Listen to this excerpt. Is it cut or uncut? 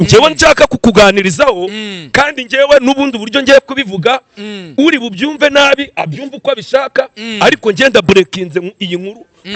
uncut